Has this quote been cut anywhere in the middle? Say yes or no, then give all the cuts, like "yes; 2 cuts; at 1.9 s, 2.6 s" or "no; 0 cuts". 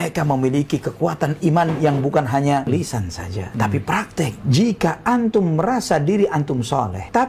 yes; 2 cuts; at 2.7 s, 4.4 s